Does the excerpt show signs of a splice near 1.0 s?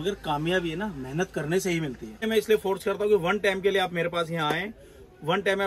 no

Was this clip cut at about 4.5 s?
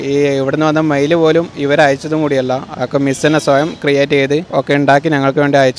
yes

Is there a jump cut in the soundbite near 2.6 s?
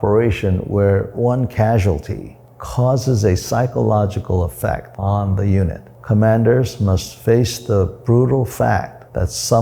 no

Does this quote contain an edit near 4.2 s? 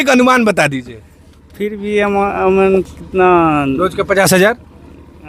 no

